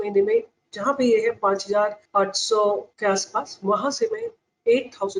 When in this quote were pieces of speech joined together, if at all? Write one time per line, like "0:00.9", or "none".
0:02.0
0:02.9